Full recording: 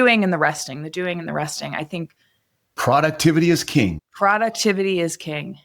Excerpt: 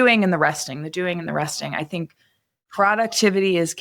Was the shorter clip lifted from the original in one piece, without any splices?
no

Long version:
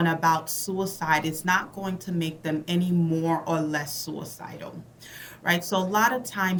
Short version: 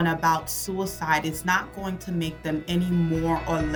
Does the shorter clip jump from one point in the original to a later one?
no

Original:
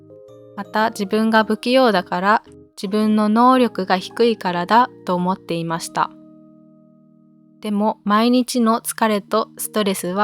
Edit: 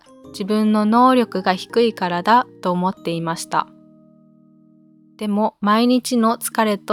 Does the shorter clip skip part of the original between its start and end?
no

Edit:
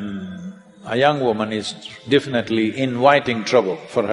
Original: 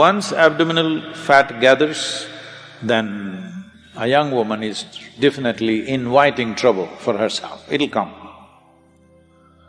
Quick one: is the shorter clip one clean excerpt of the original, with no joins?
yes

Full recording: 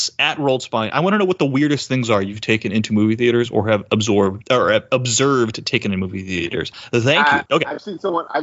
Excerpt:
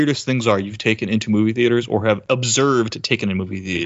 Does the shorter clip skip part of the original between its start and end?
yes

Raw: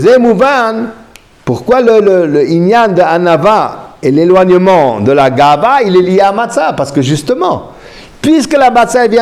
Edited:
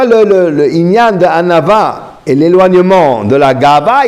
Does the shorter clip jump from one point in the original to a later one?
no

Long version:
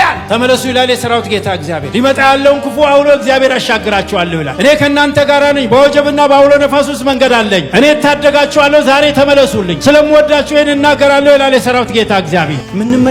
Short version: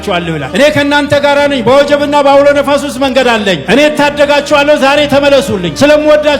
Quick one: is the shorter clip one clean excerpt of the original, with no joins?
yes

